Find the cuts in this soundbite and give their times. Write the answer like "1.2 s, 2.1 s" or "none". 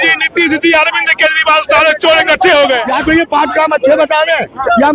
2.8 s